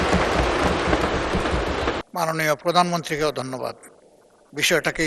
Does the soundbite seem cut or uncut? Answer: cut